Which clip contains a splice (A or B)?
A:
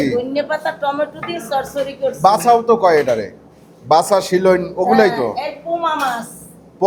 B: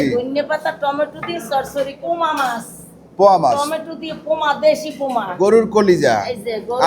B